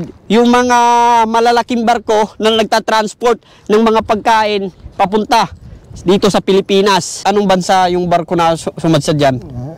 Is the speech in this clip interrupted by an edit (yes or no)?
yes